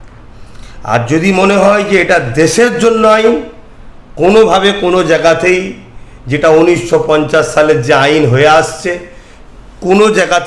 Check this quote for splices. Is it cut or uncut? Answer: uncut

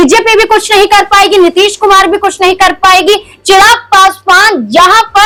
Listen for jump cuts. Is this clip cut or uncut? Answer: uncut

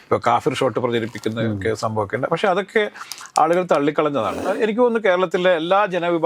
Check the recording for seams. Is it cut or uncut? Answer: cut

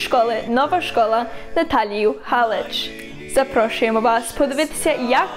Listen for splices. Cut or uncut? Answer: cut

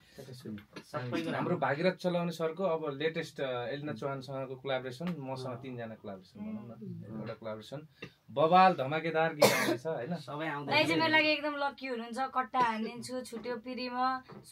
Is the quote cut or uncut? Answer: uncut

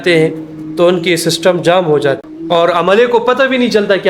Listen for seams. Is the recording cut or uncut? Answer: cut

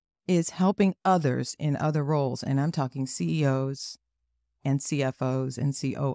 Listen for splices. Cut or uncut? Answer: cut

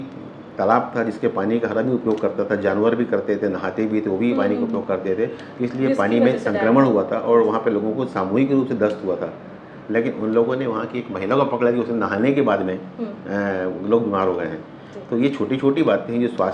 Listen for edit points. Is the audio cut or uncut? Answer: uncut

